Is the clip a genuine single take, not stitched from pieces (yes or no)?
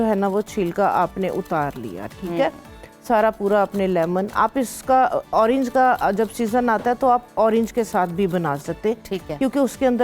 yes